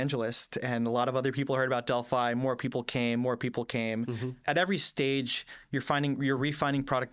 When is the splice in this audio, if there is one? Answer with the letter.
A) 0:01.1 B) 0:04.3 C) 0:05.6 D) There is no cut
B